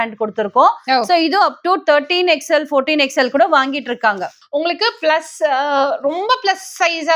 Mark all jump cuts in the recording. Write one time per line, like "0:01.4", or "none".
0:04.3